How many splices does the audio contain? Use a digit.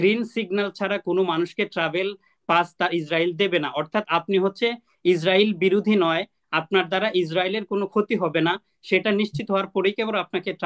0